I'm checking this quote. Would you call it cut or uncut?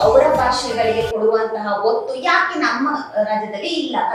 uncut